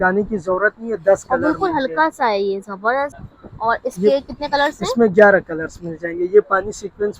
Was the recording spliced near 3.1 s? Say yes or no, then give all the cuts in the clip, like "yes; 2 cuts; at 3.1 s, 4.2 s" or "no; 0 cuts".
yes; 1 cut; at 3.1 s